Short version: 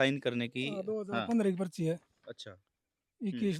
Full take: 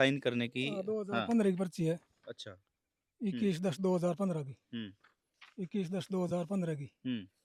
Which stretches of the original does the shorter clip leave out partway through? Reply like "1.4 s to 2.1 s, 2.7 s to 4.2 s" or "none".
none